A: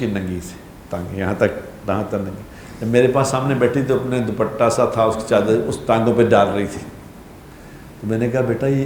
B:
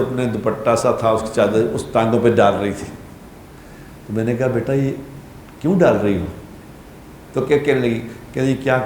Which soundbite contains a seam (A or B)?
B